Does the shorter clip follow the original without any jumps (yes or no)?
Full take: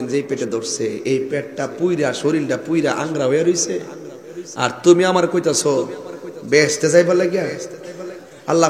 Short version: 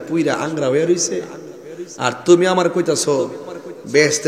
yes